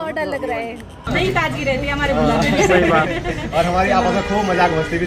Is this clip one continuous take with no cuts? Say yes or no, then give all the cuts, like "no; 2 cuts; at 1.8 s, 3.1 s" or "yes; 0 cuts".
no; 1 cut; at 1.0 s